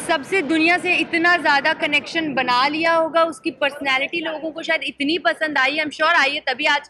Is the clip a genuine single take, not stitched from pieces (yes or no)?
yes